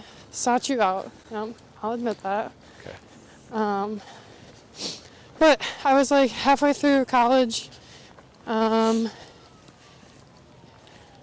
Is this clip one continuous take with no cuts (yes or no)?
yes